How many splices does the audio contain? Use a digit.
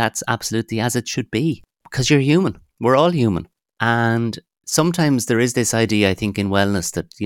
0